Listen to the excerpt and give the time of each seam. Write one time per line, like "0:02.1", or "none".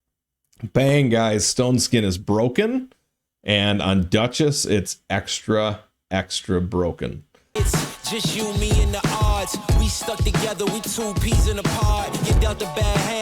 0:07.4

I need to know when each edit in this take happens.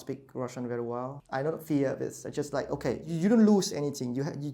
0:01.2
0:03.1

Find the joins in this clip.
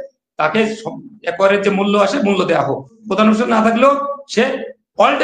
0:03.0

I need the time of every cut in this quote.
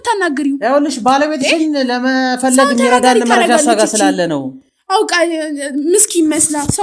none

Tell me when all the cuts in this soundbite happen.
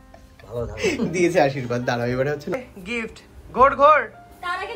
0:02.5

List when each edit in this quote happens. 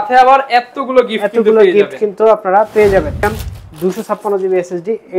0:03.4

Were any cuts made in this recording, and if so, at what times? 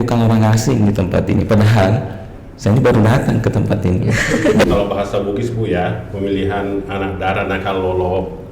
0:04.7

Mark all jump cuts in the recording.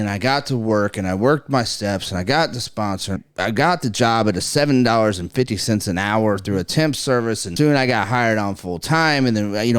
0:03.2
0:07.4

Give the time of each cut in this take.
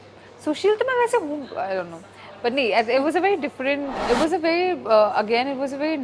0:03.9

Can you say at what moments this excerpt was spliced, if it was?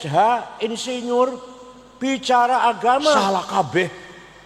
0:03.2

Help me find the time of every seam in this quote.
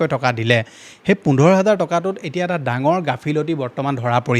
none

